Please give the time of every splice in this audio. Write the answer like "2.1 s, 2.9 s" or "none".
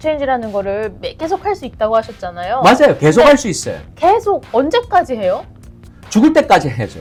none